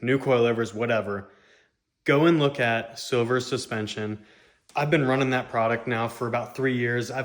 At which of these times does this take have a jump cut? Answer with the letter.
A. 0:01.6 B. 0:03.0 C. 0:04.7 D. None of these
C